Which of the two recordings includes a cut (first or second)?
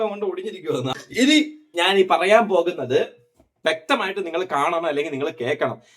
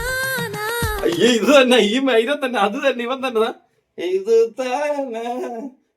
first